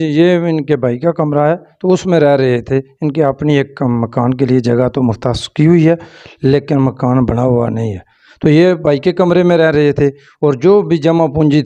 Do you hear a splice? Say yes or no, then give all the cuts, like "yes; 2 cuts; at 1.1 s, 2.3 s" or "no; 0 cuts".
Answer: no; 0 cuts